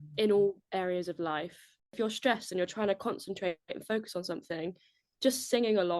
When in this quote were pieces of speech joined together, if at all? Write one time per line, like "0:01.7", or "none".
0:02.0